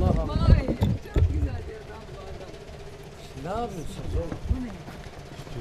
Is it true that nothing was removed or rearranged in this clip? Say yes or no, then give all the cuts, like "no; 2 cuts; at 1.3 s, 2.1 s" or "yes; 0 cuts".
yes; 0 cuts